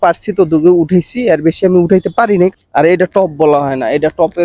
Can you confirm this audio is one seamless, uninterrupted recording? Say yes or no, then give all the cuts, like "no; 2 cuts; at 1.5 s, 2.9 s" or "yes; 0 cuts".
no; 1 cut; at 2.5 s